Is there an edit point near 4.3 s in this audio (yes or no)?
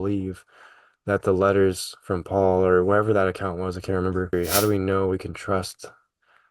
yes